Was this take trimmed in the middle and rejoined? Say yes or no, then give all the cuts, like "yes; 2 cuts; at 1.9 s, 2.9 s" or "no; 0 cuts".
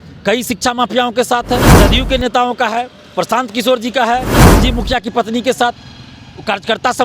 yes; 2 cuts; at 1.8 s, 4.4 s